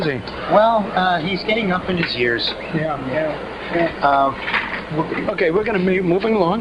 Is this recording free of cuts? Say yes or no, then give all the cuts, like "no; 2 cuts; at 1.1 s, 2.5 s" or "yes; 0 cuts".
yes; 0 cuts